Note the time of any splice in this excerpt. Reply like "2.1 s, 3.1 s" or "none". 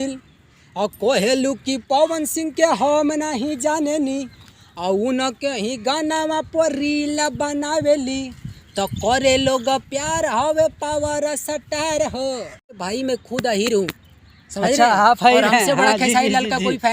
12.8 s